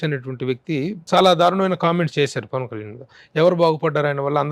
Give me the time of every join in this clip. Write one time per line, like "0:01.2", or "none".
0:01.1